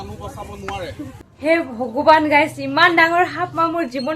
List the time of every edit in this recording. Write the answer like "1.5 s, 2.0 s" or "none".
1.1 s